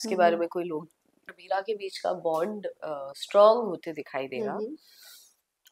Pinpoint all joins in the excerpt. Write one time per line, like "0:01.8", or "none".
0:01.3